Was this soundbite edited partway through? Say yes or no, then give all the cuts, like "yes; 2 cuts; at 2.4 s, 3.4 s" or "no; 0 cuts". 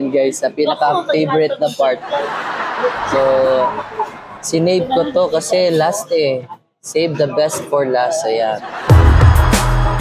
yes; 1 cut; at 8.9 s